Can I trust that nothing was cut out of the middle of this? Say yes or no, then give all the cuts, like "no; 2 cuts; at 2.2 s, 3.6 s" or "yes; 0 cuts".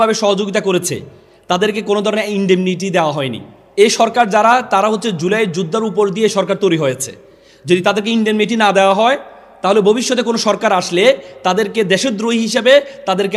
no; 1 cut; at 3.6 s